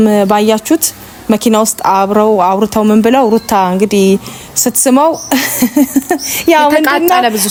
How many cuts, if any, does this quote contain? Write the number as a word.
zero